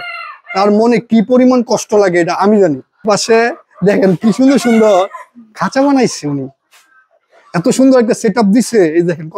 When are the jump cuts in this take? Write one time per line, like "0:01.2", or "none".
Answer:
0:03.0